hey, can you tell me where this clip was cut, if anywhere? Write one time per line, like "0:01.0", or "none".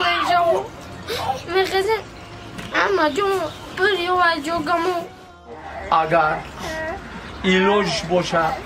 0:05.6